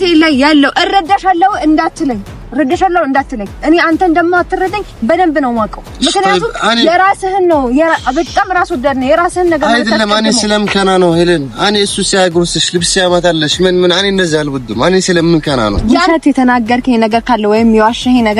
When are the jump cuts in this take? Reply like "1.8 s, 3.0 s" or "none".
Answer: 16.0 s